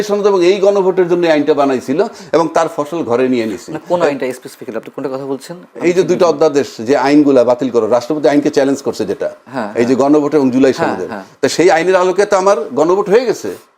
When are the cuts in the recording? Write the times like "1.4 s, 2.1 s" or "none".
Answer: none